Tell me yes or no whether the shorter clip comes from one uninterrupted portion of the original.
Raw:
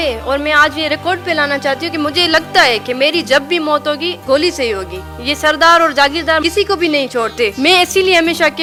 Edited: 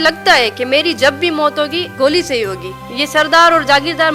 yes